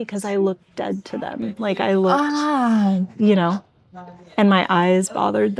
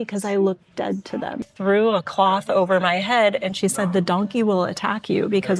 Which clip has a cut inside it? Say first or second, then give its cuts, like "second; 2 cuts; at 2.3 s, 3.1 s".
second; 1 cut; at 1.5 s